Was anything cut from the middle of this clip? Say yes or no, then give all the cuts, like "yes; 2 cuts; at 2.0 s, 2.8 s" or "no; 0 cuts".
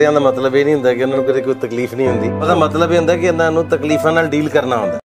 no; 0 cuts